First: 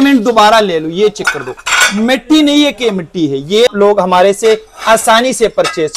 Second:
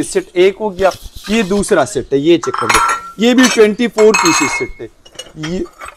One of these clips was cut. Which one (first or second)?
first